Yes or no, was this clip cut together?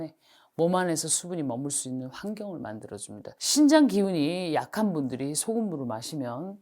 yes